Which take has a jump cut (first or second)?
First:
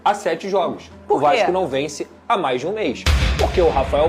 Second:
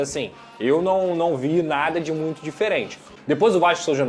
second